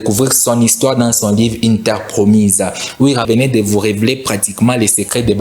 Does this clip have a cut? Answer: yes; 1 cut; at 3.2 s

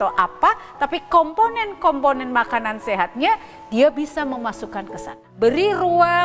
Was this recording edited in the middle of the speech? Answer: yes; 1 cut; at 5.2 s

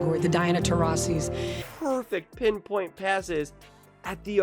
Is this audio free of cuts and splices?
no; 1 cut; at 1.7 s

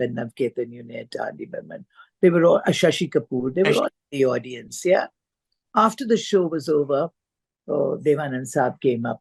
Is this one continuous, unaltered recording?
yes; 0 cuts

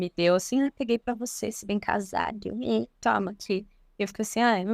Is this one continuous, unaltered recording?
yes; 0 cuts

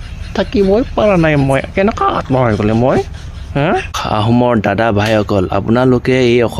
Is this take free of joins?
no; 1 cut; at 3.9 s

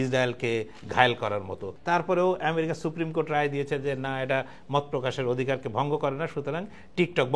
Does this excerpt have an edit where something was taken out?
yes; 1 cut; at 1.6 s

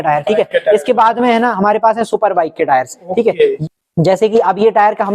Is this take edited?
yes; 1 cut; at 3.6 s

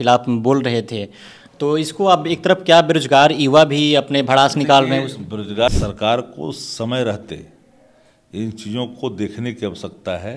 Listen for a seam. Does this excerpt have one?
yes; 1 cut; at 5.7 s

